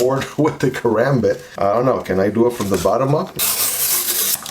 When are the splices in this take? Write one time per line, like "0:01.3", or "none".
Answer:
0:03.3